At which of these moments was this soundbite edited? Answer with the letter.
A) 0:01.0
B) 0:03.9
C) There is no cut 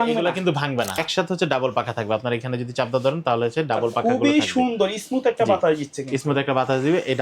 A